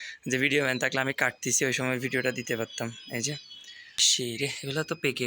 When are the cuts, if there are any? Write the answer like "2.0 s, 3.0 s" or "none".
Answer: 4.1 s